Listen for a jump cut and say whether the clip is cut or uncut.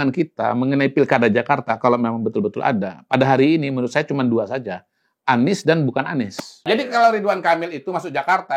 cut